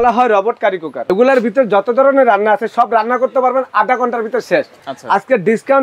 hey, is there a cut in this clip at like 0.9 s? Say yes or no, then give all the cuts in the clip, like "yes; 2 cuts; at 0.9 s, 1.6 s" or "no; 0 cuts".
yes; 2 cuts; at 0.9 s, 4.8 s